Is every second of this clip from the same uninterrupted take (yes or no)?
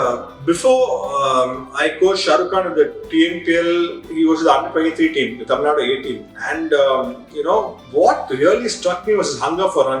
yes